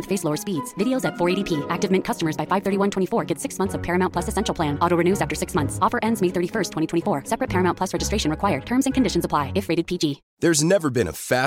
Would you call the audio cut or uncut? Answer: cut